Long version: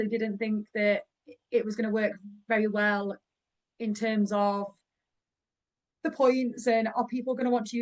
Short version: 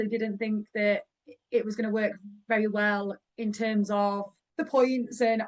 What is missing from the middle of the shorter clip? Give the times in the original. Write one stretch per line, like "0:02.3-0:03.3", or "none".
0:03.2-0:03.7
0:04.8-0:05.8